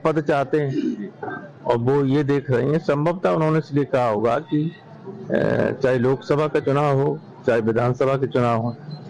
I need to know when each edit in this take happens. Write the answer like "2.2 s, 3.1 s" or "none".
3.7 s